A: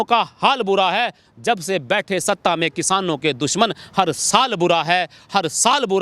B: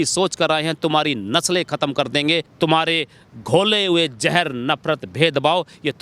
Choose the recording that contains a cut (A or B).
B